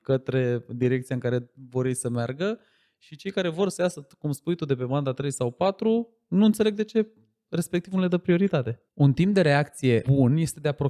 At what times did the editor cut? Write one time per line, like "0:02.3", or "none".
0:08.8
0:10.0